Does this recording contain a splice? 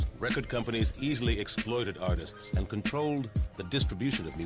no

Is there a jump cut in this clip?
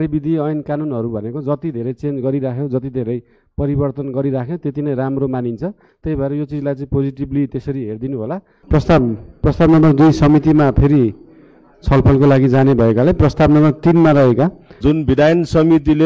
yes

